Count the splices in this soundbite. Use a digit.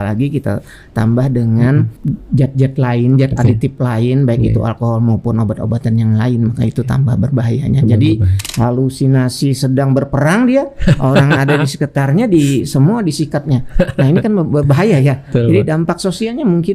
2